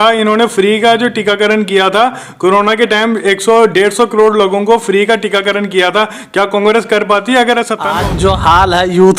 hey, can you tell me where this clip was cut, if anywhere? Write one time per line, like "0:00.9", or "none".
0:07.9